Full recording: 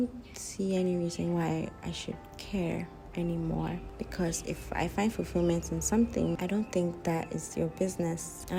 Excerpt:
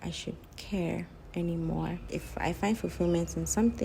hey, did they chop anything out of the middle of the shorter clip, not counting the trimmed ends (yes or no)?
yes